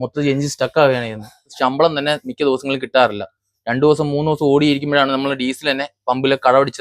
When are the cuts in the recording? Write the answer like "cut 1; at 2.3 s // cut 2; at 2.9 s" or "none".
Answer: cut 1; at 1.5 s